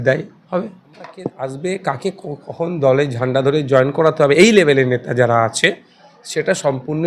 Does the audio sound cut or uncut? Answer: cut